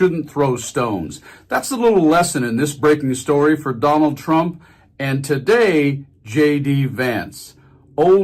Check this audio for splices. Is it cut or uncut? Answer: uncut